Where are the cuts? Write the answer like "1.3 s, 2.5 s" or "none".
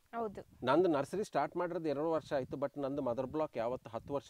none